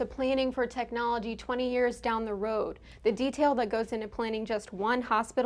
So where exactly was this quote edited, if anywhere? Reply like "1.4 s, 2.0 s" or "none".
none